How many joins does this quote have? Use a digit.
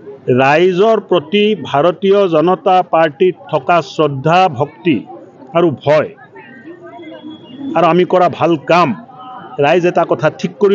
0